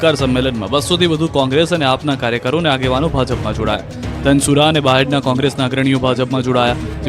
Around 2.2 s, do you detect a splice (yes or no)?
yes